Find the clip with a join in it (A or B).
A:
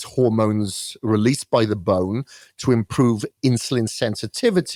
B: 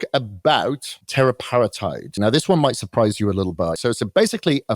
B